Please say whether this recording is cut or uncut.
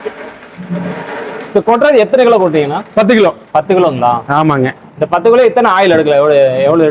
uncut